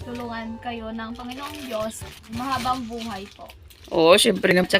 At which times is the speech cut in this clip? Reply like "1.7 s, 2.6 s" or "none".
2.2 s